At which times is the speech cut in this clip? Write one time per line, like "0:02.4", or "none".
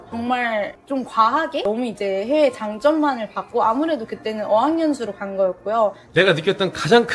0:06.0